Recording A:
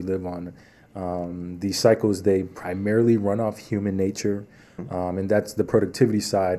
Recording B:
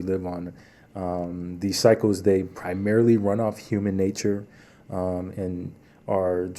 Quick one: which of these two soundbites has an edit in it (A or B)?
A